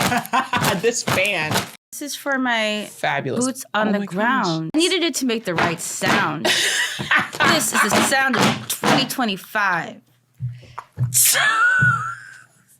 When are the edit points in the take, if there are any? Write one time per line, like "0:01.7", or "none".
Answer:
0:01.8
0:04.7